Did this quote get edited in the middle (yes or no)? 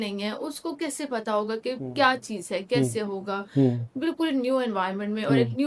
no